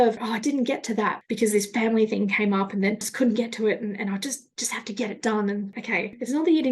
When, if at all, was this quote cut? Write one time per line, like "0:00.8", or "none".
0:01.2
0:03.1
0:05.7